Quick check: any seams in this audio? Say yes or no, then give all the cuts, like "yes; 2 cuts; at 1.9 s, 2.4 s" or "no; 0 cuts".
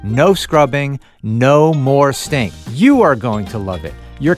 yes; 1 cut; at 2.6 s